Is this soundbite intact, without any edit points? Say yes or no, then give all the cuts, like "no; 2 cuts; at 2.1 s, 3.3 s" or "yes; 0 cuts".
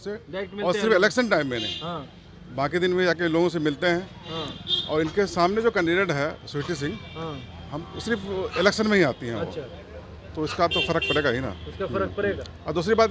yes; 0 cuts